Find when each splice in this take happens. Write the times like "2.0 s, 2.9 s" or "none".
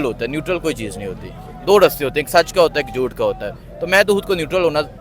none